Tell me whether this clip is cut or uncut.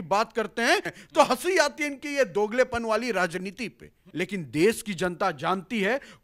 cut